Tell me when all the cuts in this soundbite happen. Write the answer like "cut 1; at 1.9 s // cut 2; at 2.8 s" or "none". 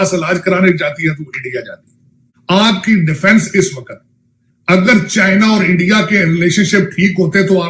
cut 1; at 2.3 s